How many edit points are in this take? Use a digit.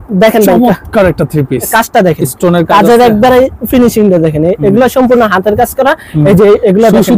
1